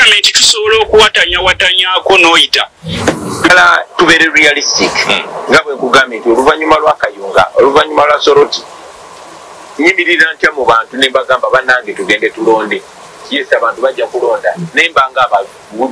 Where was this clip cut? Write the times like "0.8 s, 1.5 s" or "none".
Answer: 3.5 s